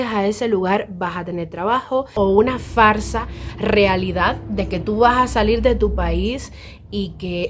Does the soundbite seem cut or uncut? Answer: cut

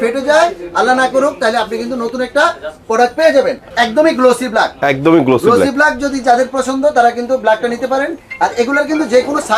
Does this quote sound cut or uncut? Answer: cut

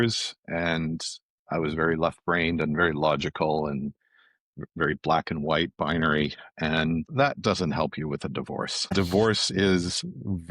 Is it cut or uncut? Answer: cut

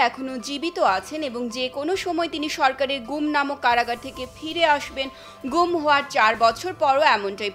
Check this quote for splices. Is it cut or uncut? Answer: uncut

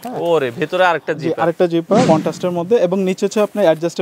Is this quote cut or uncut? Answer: cut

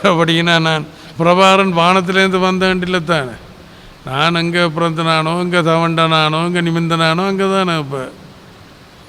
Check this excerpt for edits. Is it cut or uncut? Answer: cut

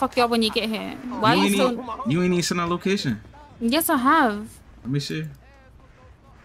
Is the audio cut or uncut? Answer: uncut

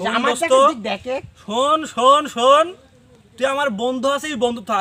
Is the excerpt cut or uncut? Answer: uncut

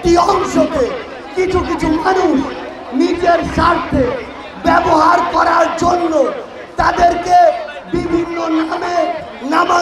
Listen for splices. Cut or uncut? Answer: uncut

